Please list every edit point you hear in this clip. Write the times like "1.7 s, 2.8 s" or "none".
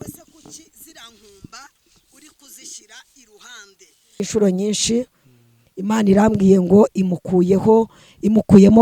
4.2 s